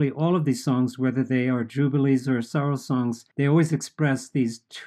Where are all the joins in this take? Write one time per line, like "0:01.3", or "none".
0:03.2